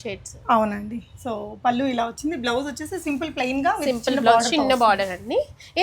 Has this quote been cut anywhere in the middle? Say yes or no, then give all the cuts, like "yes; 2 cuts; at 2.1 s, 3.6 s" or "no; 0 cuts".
no; 0 cuts